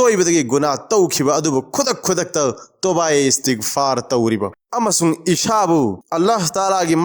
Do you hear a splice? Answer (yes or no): yes